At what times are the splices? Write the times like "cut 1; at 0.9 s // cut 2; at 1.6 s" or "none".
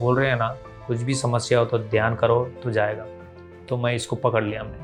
none